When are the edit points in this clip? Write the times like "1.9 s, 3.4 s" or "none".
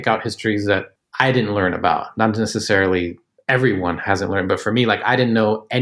0.9 s